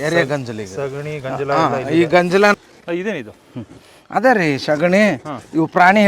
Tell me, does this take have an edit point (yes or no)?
yes